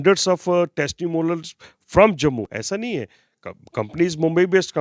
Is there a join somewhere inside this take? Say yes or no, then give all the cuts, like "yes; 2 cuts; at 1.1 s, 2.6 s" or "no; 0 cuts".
no; 0 cuts